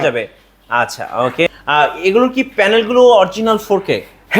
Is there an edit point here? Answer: yes; 1 cut; at 1.5 s

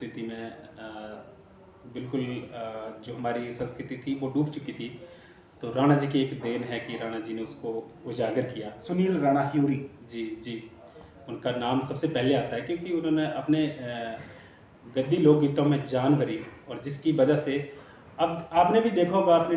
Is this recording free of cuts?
yes; 0 cuts

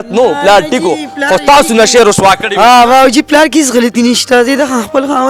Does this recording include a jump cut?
no; 0 cuts

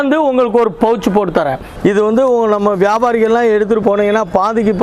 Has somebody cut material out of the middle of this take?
yes; 2 cuts; at 1.6 s, 3.8 s

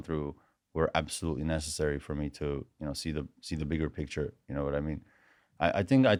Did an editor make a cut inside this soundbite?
no; 0 cuts

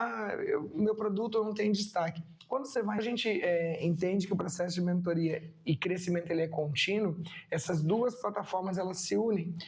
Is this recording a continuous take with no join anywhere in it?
no; 1 cut; at 3.0 s

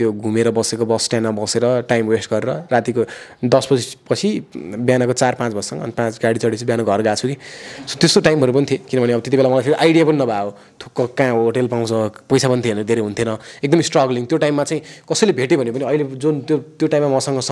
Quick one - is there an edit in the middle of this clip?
no; 0 cuts

